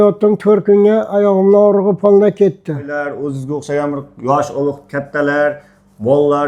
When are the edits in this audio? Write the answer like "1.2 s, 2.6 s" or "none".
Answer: 2.9 s